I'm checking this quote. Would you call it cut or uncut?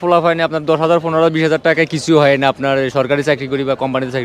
uncut